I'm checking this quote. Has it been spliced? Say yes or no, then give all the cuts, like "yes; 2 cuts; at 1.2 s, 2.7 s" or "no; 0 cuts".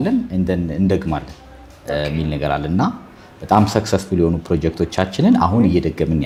no; 0 cuts